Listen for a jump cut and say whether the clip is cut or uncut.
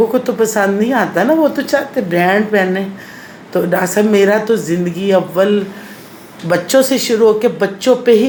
uncut